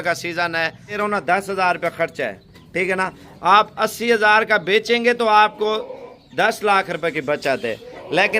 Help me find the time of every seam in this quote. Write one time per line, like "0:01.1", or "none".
0:01.0